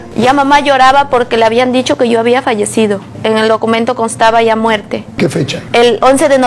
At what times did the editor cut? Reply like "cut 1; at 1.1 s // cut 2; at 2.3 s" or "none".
cut 1; at 5.1 s